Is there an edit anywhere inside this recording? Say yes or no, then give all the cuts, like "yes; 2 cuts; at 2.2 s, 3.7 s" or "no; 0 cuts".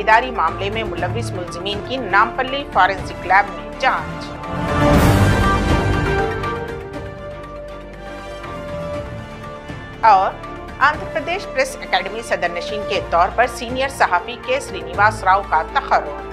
no; 0 cuts